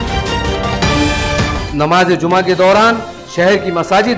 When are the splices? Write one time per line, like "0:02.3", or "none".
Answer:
0:01.5